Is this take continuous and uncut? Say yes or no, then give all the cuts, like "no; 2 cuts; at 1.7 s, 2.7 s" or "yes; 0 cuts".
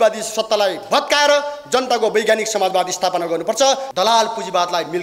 no; 1 cut; at 3.9 s